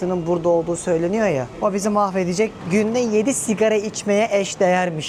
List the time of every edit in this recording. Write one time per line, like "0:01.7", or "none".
none